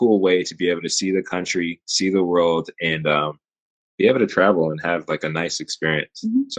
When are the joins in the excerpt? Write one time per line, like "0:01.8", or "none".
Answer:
none